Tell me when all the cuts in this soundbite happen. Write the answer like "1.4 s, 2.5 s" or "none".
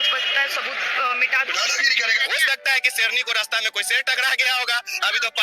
1.7 s